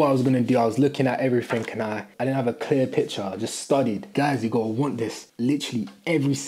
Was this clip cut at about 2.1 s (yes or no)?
yes